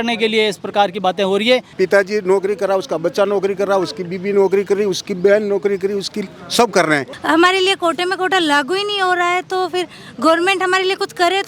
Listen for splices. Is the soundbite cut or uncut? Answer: cut